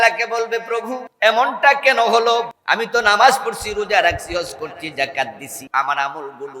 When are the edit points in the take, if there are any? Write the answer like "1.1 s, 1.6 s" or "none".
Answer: 1.0 s, 2.6 s, 5.5 s